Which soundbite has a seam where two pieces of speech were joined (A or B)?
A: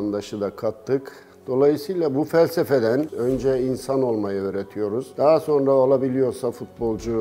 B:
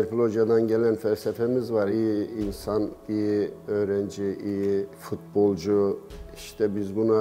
A